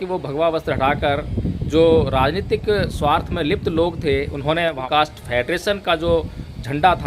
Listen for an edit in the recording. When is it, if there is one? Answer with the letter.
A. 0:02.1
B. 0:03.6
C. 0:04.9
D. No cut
C